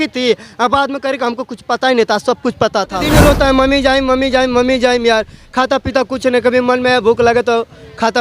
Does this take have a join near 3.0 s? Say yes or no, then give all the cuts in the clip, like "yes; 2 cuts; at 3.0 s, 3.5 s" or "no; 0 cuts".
yes; 1 cut; at 3.0 s